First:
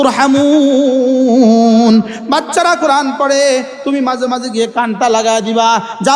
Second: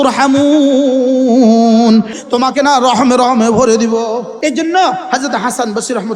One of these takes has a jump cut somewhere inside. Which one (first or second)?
second